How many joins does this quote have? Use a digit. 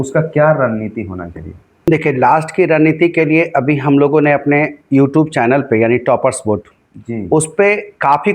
1